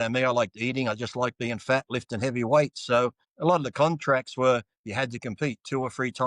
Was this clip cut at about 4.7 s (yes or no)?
no